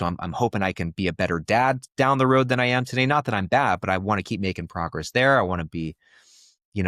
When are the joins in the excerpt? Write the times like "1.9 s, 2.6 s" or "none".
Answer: none